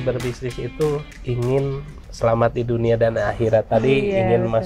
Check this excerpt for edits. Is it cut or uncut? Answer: uncut